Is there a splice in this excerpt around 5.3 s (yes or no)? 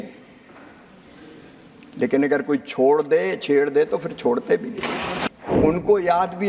yes